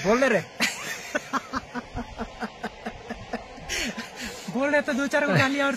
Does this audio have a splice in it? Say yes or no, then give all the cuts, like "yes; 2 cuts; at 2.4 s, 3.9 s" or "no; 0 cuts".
no; 0 cuts